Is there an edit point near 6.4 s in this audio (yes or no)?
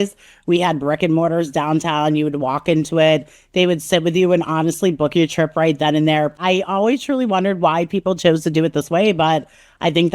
yes